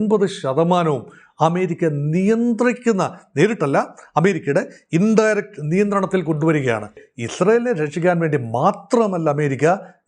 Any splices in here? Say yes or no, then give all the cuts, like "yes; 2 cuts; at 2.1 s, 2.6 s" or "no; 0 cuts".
yes; 1 cut; at 7.1 s